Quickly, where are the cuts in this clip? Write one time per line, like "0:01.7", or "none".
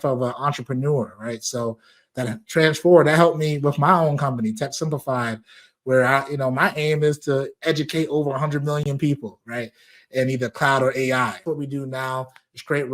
0:11.4

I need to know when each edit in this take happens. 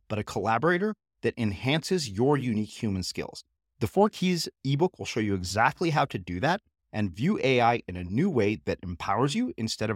none

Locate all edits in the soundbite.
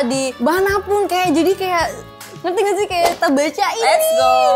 0:03.2

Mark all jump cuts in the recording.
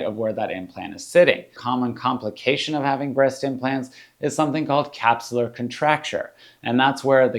0:01.6

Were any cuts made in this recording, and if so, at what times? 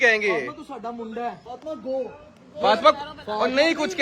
0:01.5

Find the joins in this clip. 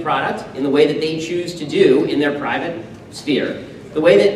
none

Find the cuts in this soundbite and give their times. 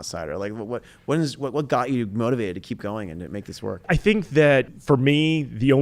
0:03.9
0:04.7

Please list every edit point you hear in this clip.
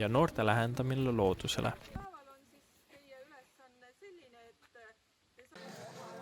0:01.9
0:05.0

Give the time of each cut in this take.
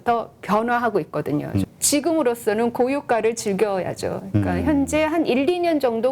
0:01.6

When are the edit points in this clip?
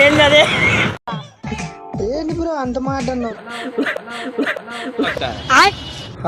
0:03.4

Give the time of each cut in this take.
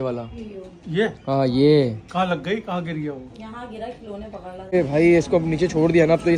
0:04.7

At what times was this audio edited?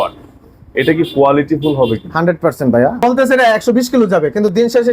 0:03.0

